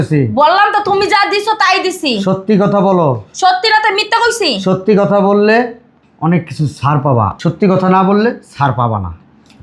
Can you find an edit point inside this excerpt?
yes; 1 cut; at 7.3 s

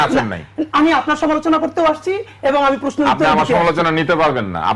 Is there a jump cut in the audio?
no; 0 cuts

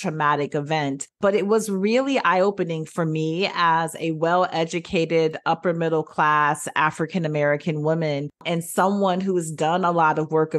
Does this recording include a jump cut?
yes; 2 cuts; at 1.2 s, 8.4 s

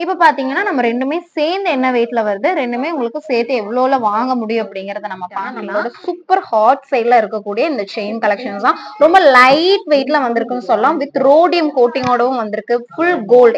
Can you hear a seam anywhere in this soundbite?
yes; 1 cut; at 5.6 s

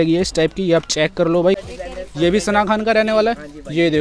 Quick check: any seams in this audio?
yes; 1 cut; at 1.7 s

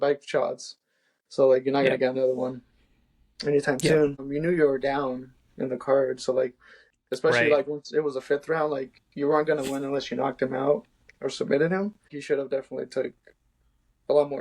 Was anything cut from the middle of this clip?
yes; 2 cuts; at 4.2 s, 12.2 s

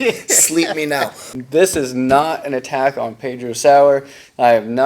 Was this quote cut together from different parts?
yes; 1 cut; at 1.3 s

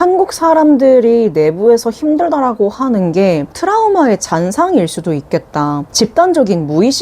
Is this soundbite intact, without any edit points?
no; 2 cuts; at 3.5 s, 5.9 s

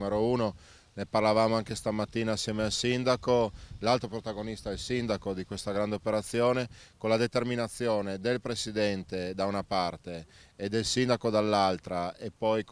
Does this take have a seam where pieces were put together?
no; 0 cuts

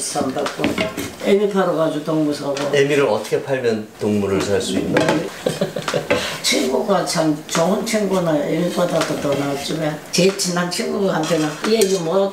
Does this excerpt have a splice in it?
yes; 2 cuts; at 1.1 s, 10.1 s

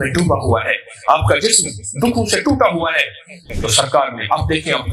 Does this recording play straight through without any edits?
no; 1 cut; at 3.4 s

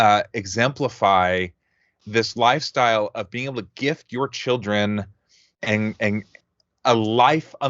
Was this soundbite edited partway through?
no; 0 cuts

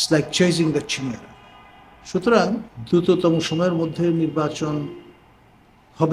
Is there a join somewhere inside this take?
yes; 1 cut; at 2.7 s

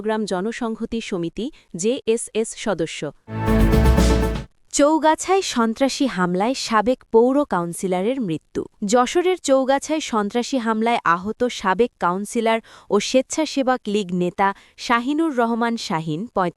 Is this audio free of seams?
no; 3 cuts; at 3.3 s, 4.5 s, 8.7 s

